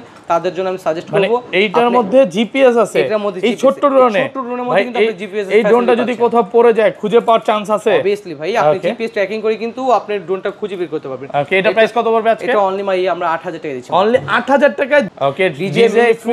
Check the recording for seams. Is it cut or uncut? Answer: cut